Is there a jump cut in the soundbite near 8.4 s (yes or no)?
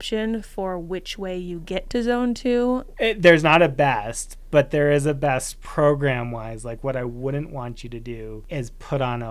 yes